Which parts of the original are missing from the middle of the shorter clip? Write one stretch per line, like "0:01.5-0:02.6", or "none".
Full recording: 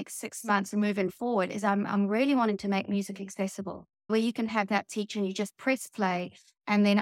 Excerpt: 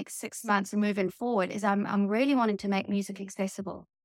none